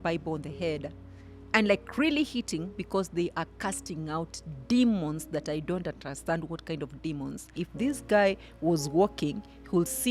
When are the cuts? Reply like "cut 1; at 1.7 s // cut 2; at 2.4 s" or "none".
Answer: cut 1; at 7.6 s